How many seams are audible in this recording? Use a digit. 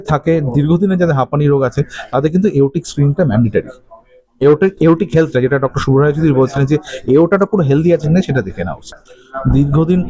0